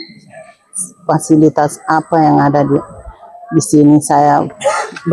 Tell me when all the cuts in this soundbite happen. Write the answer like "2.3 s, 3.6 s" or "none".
none